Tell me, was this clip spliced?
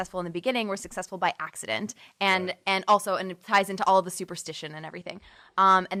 no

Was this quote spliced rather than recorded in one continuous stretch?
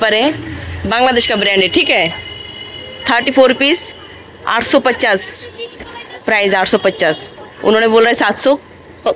no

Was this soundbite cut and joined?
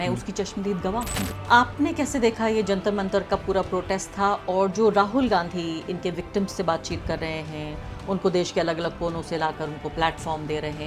yes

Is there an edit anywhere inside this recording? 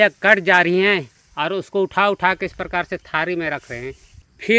no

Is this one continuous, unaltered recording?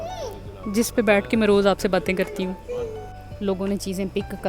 no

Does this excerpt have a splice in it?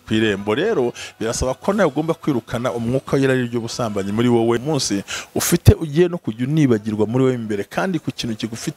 yes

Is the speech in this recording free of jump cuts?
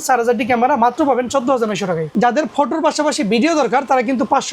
no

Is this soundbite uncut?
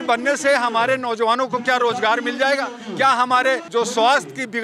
no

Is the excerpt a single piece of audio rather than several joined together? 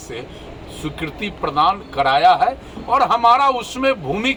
yes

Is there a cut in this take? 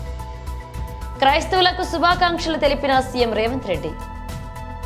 yes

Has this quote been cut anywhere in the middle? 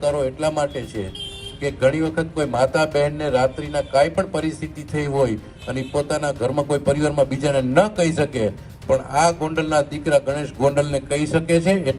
no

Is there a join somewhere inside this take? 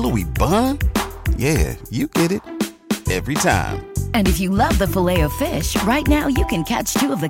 no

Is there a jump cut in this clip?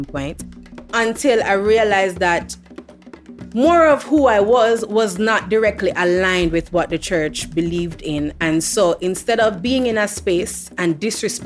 no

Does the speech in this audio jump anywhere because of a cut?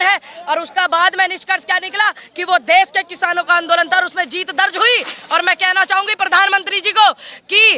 no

